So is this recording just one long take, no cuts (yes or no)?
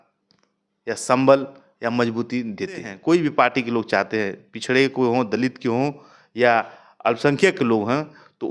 no